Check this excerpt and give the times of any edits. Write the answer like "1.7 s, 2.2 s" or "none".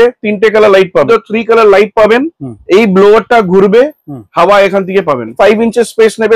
1.1 s, 5.3 s